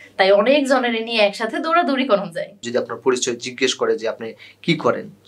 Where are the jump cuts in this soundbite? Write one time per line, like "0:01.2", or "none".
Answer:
0:02.7